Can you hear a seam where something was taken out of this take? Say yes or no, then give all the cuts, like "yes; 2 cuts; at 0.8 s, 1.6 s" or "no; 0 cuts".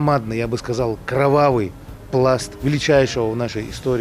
yes; 1 cut; at 2.5 s